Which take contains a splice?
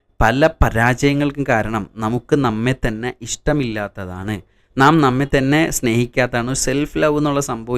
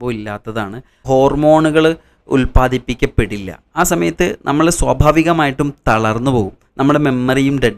second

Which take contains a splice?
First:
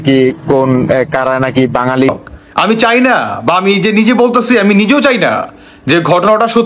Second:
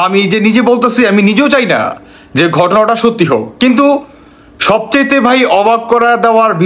first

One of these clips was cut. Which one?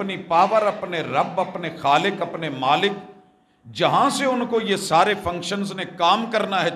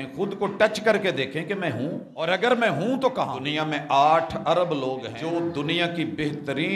second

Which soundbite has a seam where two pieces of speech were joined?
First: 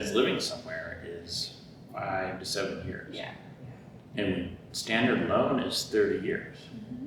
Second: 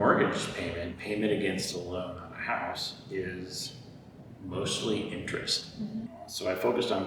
second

